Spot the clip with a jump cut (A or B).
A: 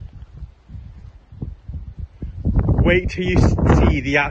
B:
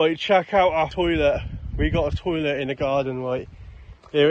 B